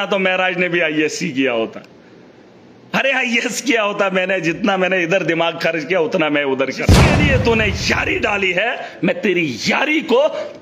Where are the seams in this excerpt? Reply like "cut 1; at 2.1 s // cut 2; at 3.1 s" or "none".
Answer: cut 1; at 7.0 s